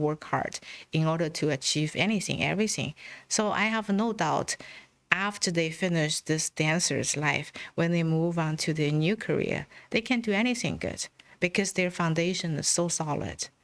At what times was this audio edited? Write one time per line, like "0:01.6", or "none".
none